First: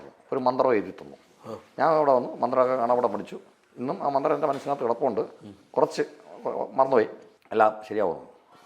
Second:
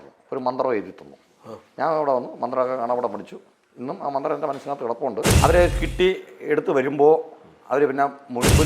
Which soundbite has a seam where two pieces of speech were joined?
second; 1 cut; at 5.3 s

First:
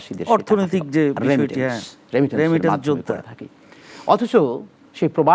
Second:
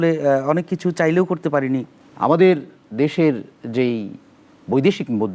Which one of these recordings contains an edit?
second; 1 cut; at 2.0 s

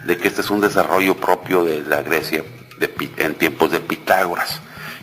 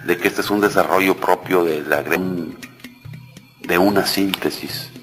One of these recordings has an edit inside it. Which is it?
first; 1 cut; at 2.2 s

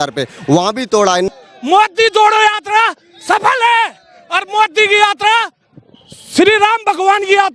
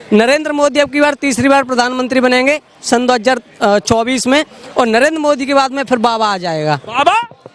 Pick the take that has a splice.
first; 1 cut; at 1.3 s

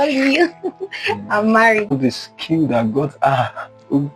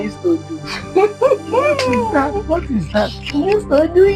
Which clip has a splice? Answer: first; 1 cut; at 2.0 s

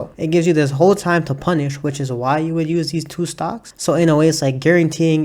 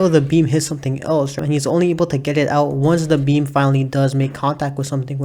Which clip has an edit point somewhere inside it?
second; 1 cut; at 1.4 s

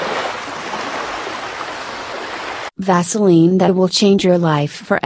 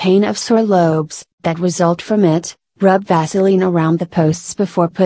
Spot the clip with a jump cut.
second; 1 cut; at 3.6 s

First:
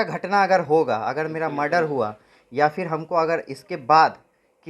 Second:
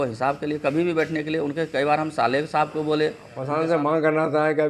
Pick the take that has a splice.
second; 1 cut; at 3.3 s

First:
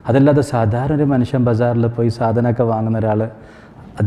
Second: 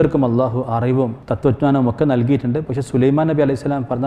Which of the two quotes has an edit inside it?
second; 1 cut; at 1.2 s

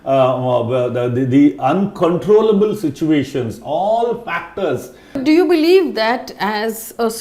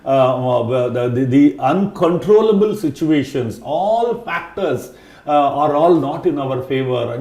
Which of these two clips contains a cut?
first; 1 cut; at 5.2 s

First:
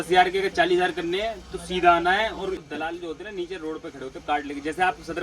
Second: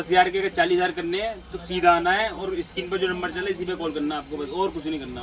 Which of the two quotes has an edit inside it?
first; 1 cut; at 2.6 s

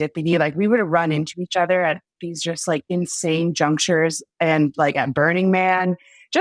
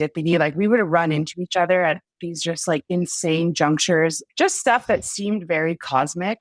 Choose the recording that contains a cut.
second; 1 cut; at 4.2 s

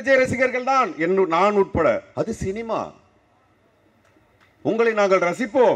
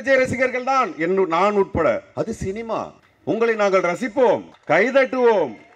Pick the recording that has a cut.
second; 2 cuts; at 3.0 s, 4.5 s

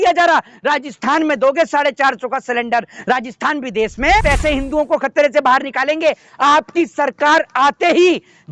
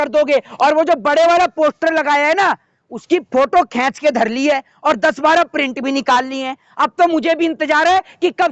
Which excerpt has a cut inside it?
first; 1 cut; at 4.2 s

